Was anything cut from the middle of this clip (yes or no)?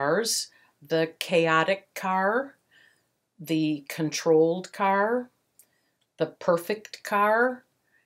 no